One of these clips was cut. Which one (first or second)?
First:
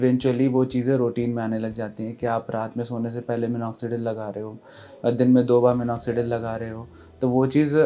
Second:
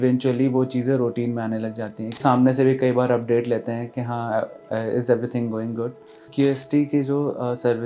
second